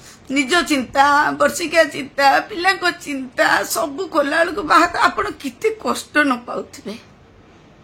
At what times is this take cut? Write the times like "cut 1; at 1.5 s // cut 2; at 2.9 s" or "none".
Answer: none